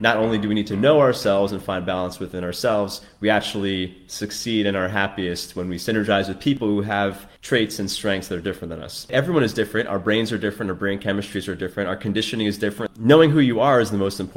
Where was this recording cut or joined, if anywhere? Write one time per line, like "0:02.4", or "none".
0:06.9
0:09.1
0:12.9